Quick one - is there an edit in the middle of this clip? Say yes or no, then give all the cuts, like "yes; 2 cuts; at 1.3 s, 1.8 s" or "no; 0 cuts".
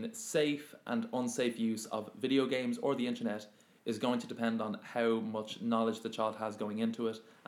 no; 0 cuts